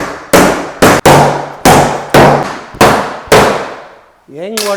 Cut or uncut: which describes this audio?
cut